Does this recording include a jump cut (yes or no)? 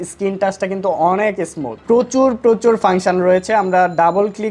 no